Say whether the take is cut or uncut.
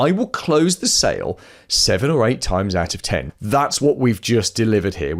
cut